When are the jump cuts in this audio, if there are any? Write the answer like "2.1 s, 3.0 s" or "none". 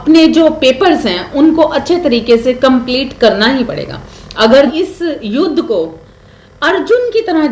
4.7 s